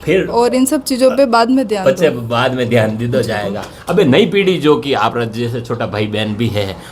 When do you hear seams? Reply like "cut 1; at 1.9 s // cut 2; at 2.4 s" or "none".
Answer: none